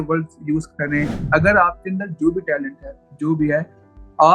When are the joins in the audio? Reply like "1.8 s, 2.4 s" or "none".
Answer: 1.3 s